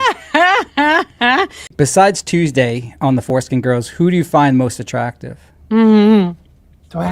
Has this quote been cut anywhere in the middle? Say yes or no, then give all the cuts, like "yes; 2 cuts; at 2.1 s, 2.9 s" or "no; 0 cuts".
yes; 1 cut; at 1.7 s